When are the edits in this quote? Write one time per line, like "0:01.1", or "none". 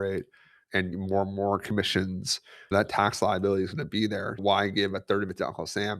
0:00.9
0:02.7
0:04.4